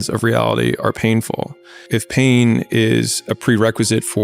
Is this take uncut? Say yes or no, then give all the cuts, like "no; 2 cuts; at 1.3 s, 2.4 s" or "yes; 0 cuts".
no; 1 cut; at 1.9 s